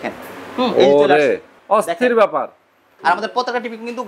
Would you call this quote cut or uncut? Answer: cut